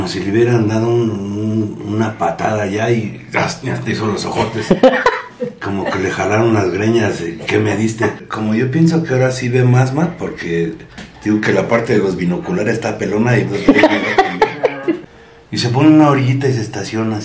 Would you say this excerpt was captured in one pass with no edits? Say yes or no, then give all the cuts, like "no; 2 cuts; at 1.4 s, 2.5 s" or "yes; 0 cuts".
no; 2 cuts; at 8.2 s, 15.0 s